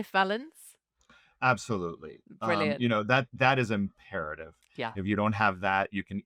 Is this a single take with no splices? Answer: yes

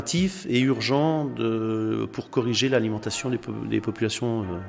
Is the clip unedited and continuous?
yes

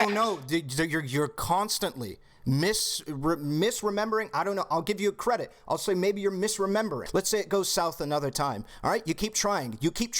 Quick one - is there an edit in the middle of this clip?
yes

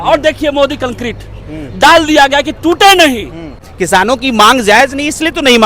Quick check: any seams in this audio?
yes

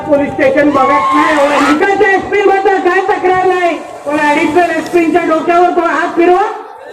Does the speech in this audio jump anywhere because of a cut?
yes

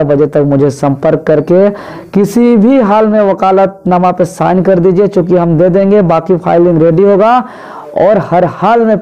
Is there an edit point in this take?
no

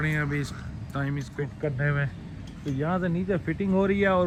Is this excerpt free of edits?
yes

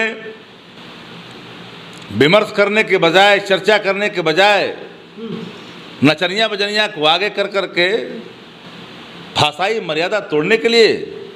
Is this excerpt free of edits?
yes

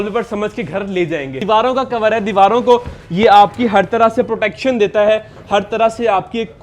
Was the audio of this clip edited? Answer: yes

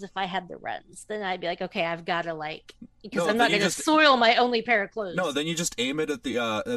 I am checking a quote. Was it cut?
no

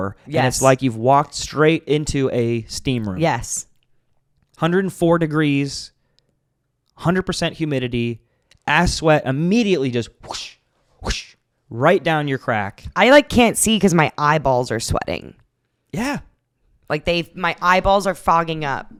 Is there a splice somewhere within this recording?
no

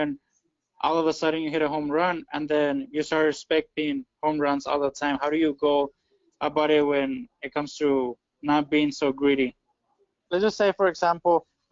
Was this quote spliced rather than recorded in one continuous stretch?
yes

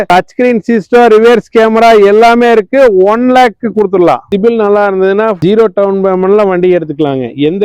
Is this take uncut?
no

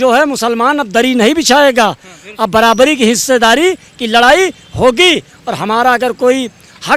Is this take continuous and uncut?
yes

